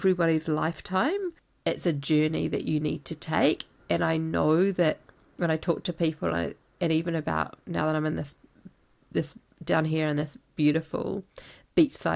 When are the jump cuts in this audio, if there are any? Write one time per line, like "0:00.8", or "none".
0:01.5